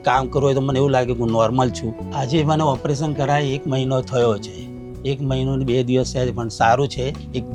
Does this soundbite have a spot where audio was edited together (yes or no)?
no